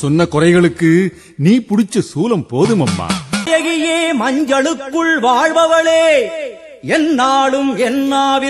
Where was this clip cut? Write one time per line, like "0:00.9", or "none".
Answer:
0:03.5